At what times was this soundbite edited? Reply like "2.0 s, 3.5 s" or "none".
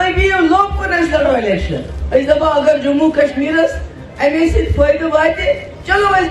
1.9 s